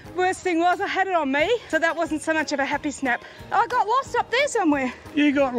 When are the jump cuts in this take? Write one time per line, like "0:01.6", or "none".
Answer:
0:01.6
0:03.4